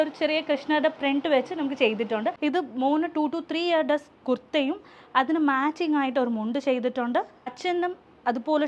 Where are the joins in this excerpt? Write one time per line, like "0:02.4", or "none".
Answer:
0:02.4